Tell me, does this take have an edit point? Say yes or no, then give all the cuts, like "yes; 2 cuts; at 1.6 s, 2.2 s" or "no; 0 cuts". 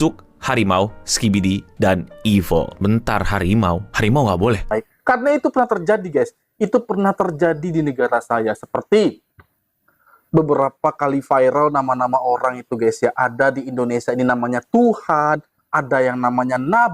yes; 1 cut; at 4.7 s